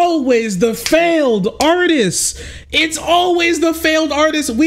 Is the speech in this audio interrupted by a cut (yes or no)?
no